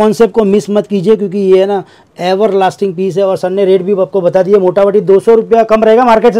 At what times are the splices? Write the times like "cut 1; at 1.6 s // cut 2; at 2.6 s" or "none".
none